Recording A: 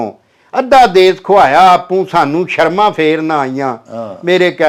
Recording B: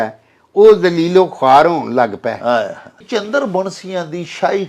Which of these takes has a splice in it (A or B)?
B